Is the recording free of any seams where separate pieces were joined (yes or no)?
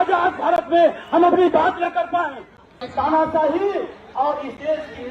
no